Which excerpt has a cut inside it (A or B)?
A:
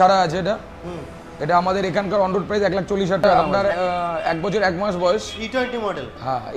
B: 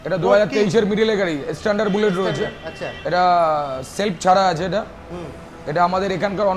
A